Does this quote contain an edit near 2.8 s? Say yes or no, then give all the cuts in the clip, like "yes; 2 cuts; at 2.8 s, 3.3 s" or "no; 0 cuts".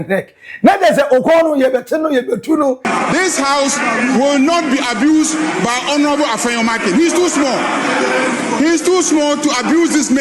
yes; 1 cut; at 2.8 s